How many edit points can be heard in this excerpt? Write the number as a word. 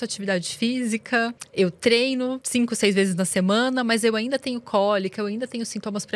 two